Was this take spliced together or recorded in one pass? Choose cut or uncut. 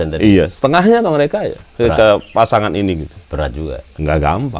uncut